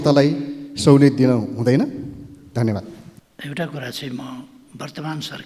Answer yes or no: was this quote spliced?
no